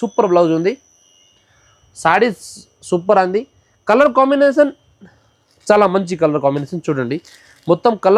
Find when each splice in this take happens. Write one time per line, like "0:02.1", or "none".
none

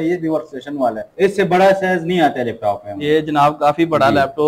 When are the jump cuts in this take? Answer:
0:01.0

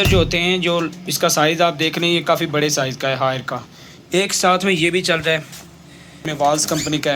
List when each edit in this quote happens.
0:06.3

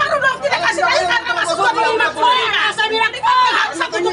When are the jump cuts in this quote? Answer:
none

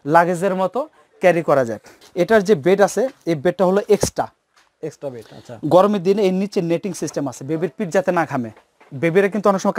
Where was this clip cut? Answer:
0:02.0

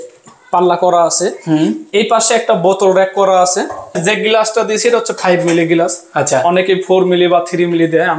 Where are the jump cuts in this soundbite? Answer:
0:04.0

